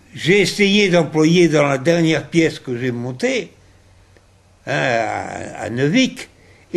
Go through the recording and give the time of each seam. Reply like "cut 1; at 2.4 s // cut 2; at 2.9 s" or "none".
none